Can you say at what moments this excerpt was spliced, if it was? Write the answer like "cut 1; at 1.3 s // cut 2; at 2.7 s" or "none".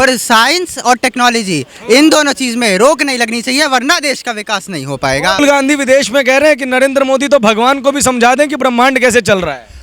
cut 1; at 5.4 s